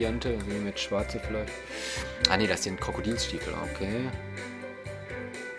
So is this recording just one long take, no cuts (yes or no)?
yes